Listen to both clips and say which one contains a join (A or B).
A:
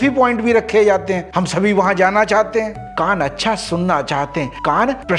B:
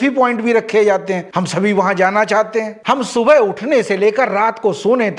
B